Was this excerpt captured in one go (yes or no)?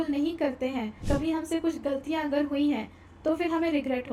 no